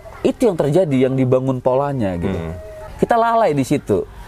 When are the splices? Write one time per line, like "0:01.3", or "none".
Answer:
0:02.9